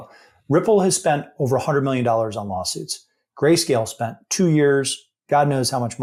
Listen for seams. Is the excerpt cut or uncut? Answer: uncut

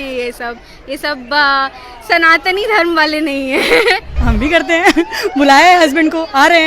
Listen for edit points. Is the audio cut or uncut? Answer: cut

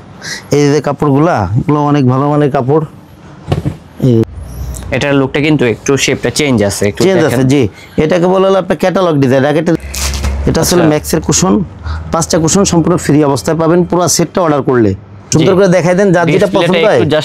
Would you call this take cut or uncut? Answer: cut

